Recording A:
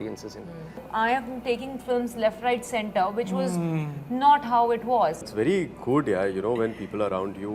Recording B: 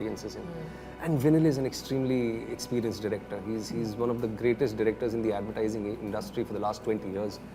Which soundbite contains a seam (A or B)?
A